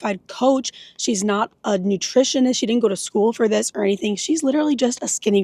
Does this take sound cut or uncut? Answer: uncut